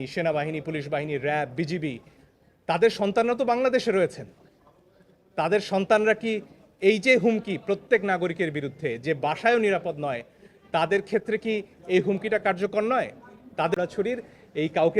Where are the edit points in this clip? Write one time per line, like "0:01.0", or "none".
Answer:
0:13.8

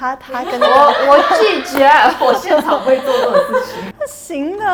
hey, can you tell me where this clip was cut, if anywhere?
none

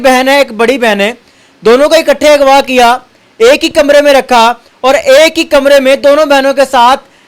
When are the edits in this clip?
none

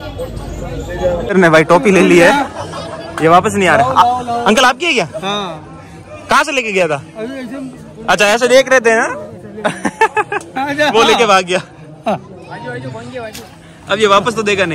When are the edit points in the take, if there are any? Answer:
0:01.3

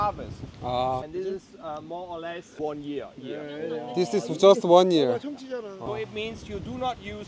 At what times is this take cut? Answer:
0:01.0
0:05.9

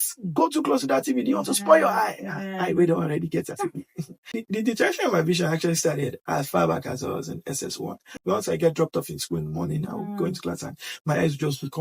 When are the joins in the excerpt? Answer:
0:04.4
0:08.2

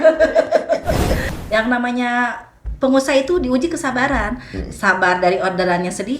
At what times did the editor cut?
0:01.3

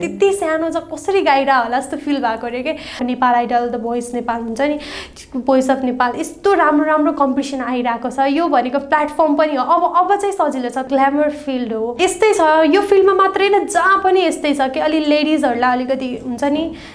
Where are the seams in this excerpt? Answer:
0:03.0
0:10.9
0:11.9

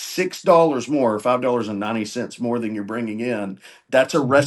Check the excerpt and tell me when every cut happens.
none

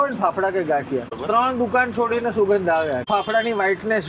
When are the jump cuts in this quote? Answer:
0:01.1
0:03.1

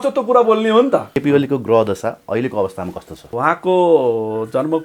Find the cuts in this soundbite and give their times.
0:01.1
0:03.3

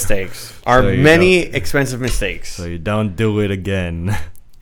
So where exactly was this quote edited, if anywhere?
none

